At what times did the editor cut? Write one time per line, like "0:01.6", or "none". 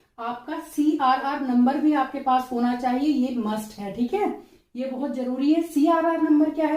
none